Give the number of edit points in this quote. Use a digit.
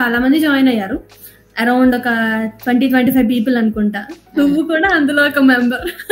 0